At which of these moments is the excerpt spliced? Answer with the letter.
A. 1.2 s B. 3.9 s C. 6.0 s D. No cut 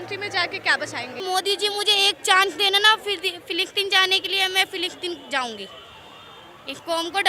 A